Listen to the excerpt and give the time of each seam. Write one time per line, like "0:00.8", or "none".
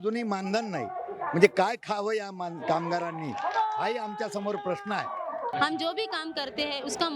0:05.5